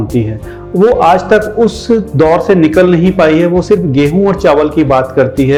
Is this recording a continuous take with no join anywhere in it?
yes; 0 cuts

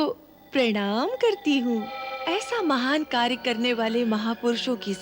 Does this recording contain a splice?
yes; 1 cut; at 2.2 s

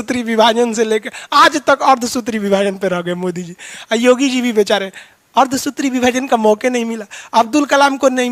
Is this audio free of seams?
yes; 0 cuts

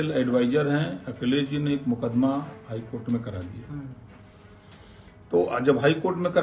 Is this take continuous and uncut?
yes; 0 cuts

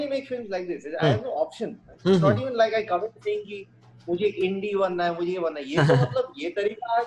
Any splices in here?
no; 0 cuts

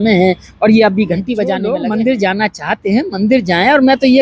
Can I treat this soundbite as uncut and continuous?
no; 1 cut; at 1.6 s

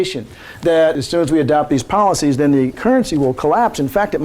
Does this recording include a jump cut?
yes; 2 cuts; at 1.0 s, 2.8 s

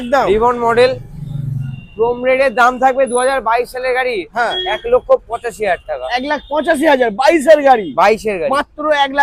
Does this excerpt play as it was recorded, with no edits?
yes; 0 cuts

